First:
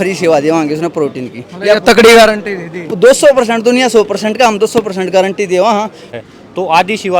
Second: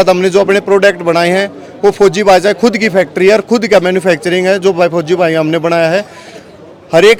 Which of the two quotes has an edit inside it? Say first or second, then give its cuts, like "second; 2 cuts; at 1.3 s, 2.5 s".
first; 1 cut; at 6.0 s